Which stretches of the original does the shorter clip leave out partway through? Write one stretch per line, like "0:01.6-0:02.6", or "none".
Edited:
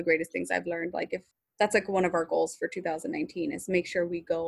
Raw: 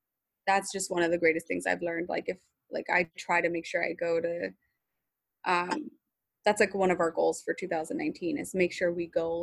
0:02.5-0:06.2